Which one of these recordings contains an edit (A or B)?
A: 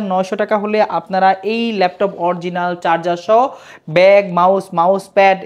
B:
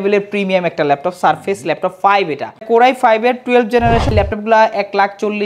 B